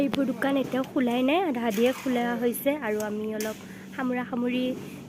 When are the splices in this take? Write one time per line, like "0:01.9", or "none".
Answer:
none